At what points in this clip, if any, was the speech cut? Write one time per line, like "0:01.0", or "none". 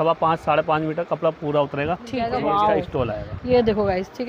0:02.2